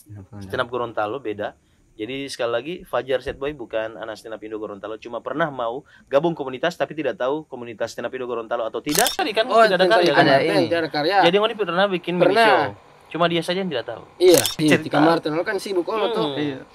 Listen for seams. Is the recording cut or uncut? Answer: cut